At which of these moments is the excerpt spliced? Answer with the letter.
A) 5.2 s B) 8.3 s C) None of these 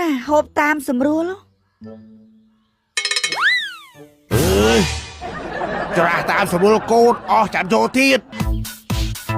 B